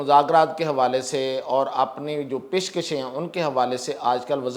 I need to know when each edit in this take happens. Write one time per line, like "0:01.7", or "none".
none